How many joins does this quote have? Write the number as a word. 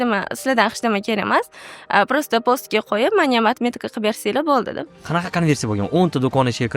one